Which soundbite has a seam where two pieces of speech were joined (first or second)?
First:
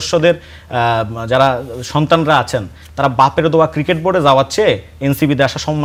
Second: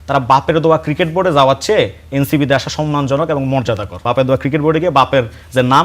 second